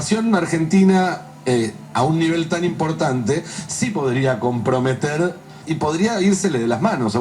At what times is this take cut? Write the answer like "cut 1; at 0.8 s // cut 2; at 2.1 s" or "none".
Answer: cut 1; at 5.6 s